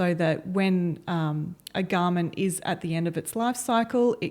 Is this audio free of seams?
yes; 0 cuts

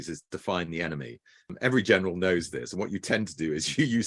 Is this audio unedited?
no; 1 cut; at 1.5 s

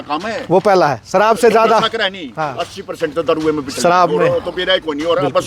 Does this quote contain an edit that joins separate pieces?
no; 0 cuts

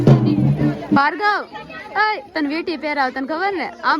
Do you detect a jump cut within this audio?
yes; 1 cut; at 1.0 s

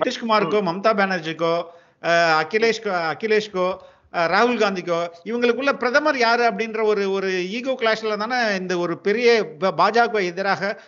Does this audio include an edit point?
no; 0 cuts

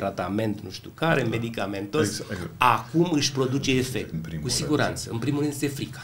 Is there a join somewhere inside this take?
yes; 1 cut; at 4.2 s

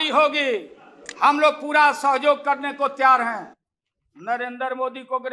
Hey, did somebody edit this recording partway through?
no; 0 cuts

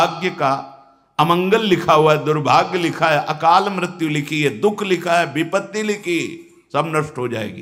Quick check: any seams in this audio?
no; 0 cuts

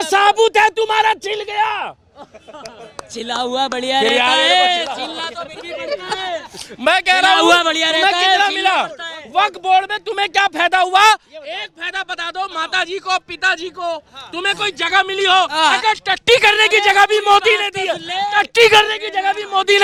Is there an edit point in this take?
no; 0 cuts

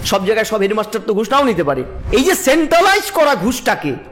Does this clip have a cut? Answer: yes; 1 cut; at 1.9 s

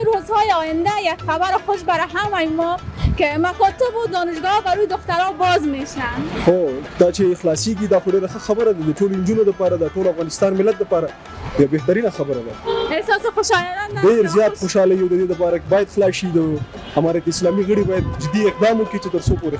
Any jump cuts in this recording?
no; 0 cuts

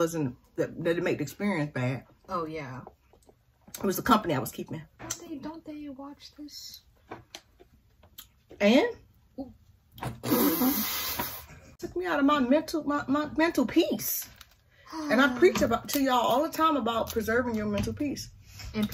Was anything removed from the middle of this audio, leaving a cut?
yes; 2 cuts; at 5.2 s, 11.8 s

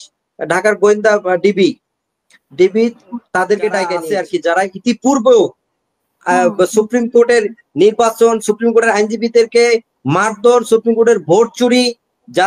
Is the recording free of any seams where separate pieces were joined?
no; 1 cut; at 4.0 s

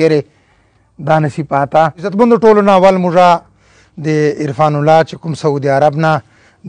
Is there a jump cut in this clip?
yes; 1 cut; at 2.1 s

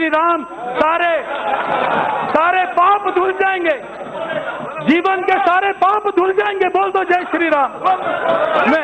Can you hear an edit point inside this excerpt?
no; 0 cuts

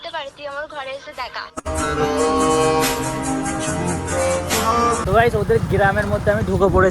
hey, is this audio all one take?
no; 1 cut; at 5.0 s

